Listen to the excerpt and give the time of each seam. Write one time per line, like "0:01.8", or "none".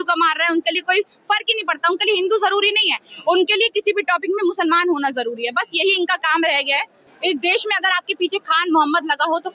0:06.9